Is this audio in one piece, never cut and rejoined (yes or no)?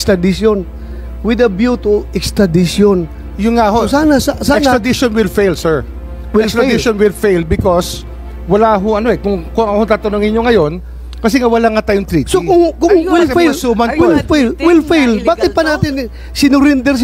yes